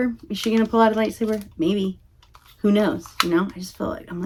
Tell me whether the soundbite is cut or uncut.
uncut